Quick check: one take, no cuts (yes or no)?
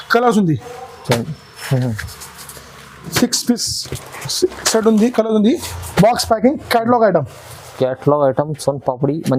yes